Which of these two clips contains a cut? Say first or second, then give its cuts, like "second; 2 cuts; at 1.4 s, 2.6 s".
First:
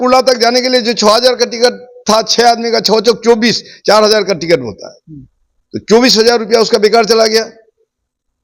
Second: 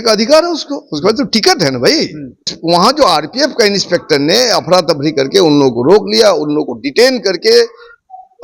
second; 1 cut; at 2.5 s